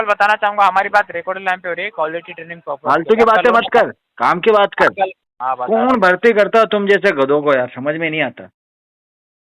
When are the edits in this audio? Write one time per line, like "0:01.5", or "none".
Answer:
0:05.3